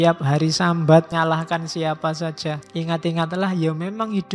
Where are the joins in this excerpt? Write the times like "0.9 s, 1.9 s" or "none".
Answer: 1.1 s, 2.6 s